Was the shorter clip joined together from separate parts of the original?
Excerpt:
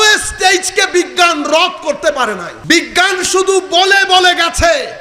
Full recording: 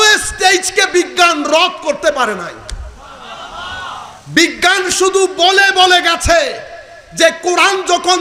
yes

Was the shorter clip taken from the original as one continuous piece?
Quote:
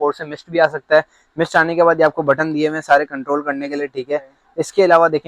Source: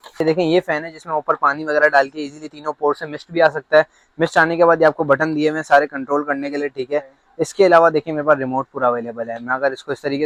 yes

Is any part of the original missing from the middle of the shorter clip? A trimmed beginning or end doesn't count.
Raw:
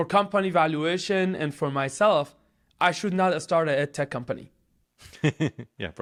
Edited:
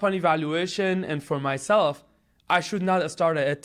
no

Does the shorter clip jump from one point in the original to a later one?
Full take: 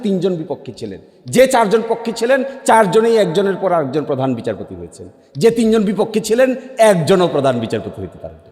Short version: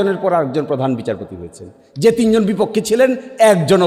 no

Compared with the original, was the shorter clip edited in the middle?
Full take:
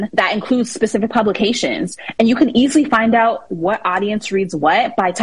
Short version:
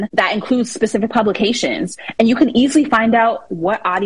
no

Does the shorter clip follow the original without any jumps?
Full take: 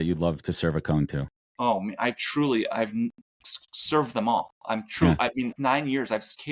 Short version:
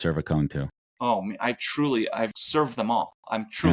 no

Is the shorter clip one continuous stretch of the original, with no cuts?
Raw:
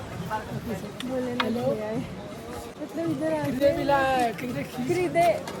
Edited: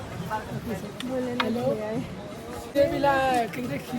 no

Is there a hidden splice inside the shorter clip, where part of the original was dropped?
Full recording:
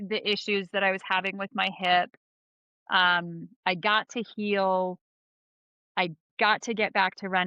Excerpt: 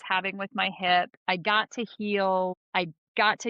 yes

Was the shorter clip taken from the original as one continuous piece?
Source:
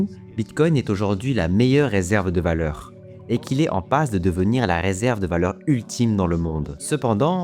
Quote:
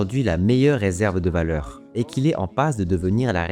no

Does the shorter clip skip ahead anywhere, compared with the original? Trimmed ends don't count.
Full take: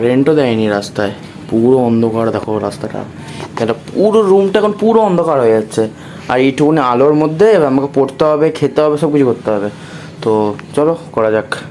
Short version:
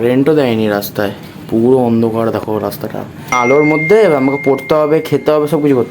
yes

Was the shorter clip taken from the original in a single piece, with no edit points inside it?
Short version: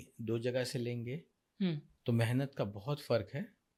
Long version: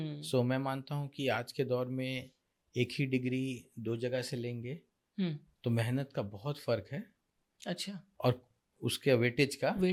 yes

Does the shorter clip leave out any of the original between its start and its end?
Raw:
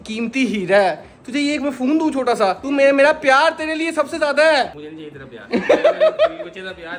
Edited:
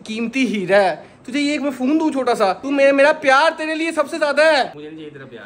no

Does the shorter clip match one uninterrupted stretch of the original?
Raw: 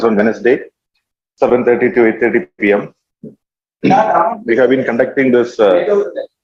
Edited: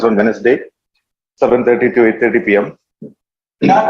no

